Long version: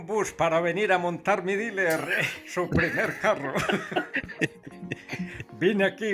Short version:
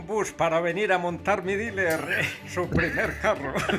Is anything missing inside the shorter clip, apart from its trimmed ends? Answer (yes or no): no